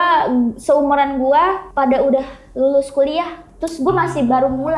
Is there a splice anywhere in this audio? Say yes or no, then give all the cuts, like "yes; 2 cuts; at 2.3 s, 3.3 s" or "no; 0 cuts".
yes; 1 cut; at 1.7 s